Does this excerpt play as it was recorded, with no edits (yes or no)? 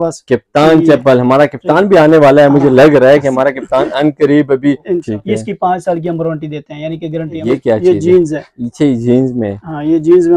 no